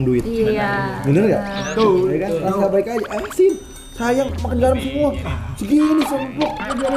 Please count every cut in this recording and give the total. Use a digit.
0